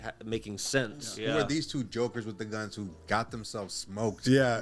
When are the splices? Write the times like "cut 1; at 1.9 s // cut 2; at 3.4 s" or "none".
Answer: cut 1; at 1.1 s